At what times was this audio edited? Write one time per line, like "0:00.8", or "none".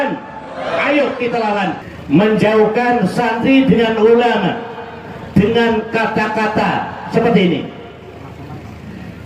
0:01.8